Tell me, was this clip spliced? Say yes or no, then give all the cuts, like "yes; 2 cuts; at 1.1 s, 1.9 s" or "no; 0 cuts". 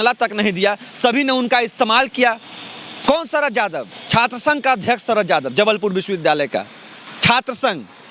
no; 0 cuts